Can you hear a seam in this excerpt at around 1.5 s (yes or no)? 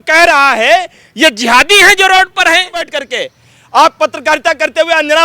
no